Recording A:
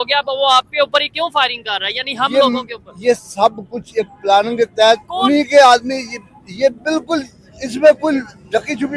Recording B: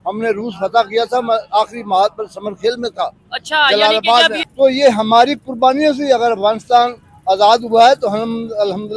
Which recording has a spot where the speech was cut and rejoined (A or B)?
B